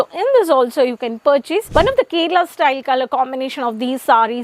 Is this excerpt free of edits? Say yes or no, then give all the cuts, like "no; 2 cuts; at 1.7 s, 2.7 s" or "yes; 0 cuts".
no; 1 cut; at 1.7 s